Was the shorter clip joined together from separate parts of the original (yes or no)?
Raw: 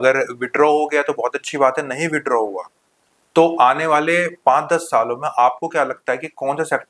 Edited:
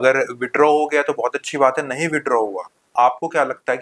yes